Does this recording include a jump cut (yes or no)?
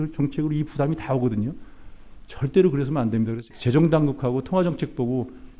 yes